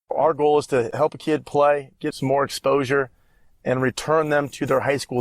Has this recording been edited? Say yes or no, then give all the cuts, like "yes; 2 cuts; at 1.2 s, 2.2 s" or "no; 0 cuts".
yes; 2 cuts; at 0.9 s, 2.1 s